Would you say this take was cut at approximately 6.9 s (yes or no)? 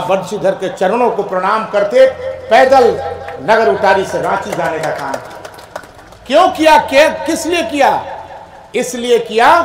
no